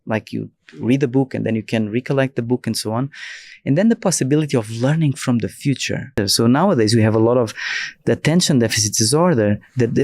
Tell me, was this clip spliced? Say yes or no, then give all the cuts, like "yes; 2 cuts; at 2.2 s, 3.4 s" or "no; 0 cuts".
yes; 1 cut; at 6.2 s